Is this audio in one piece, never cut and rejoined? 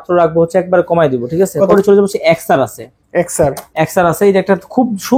no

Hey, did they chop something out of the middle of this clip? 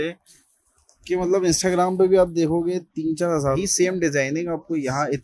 yes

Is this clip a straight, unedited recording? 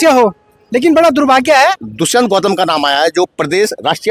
no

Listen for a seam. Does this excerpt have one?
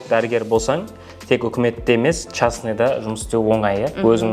no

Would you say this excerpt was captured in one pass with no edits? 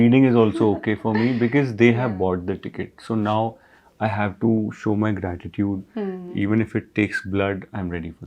yes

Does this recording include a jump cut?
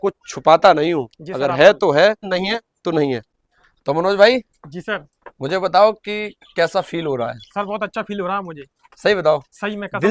yes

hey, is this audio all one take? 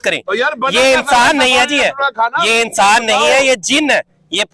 yes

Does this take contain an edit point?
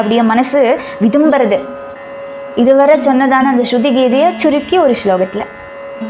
yes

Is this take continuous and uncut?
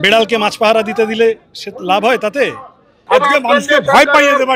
no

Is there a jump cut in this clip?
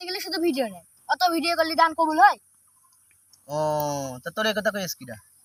no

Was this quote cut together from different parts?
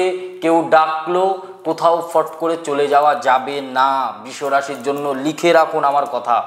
no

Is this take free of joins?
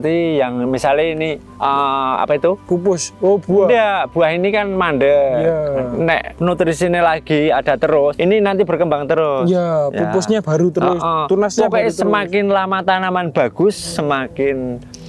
yes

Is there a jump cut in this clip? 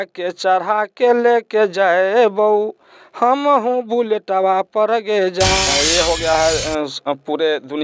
yes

